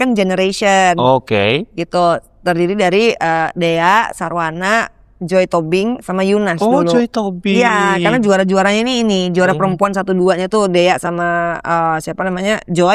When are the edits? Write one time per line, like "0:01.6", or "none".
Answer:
none